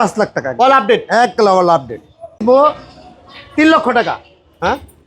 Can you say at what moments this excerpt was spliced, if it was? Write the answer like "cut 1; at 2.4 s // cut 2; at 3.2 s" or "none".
cut 1; at 2.4 s